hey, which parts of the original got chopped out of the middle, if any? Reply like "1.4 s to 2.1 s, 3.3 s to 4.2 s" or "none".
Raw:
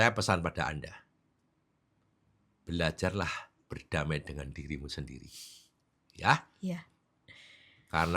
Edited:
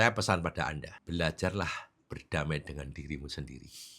0.9 s to 2.5 s